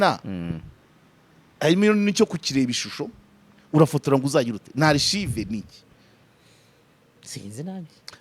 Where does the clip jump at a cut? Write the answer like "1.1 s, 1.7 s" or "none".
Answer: none